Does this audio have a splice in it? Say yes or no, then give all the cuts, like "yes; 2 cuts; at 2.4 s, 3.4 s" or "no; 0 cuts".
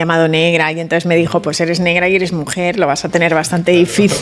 no; 0 cuts